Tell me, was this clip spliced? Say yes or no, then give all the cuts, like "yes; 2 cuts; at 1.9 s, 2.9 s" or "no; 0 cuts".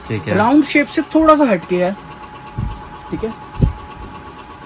no; 0 cuts